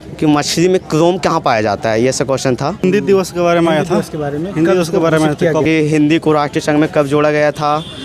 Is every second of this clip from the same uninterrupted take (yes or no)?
no